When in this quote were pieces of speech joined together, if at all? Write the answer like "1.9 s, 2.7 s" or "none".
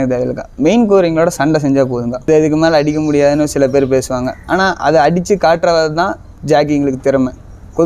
2.2 s